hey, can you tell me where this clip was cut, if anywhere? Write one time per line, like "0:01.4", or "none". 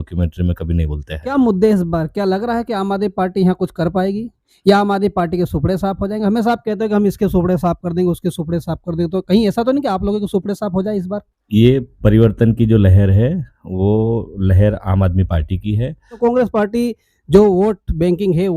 0:01.3
0:11.3
0:16.1